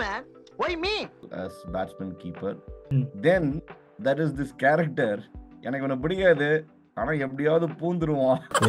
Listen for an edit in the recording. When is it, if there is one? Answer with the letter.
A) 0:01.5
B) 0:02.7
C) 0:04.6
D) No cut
B